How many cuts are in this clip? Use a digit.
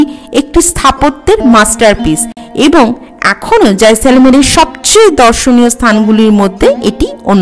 0